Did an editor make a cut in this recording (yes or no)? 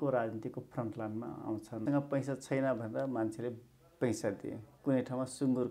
yes